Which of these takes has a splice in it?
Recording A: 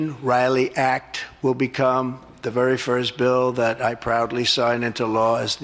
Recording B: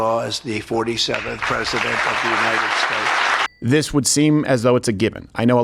B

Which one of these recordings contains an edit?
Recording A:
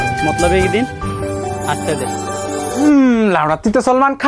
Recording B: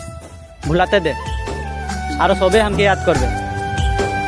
A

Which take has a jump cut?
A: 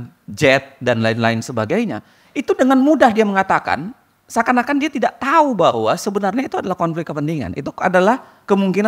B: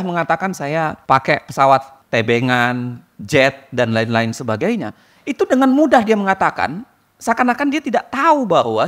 B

